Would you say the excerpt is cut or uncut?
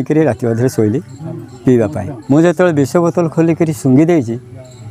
cut